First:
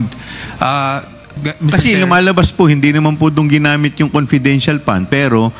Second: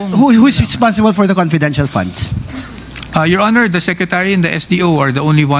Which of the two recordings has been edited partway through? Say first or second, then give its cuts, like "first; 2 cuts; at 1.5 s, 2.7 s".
first; 1 cut; at 1.5 s